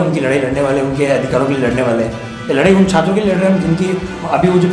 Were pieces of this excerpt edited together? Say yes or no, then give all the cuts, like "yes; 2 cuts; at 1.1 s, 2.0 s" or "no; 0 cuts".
yes; 1 cut; at 2.3 s